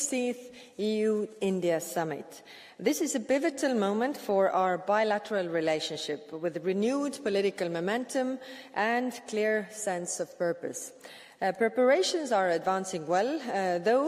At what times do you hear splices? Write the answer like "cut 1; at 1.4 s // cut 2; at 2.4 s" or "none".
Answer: none